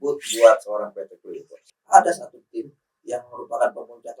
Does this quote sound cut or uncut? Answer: cut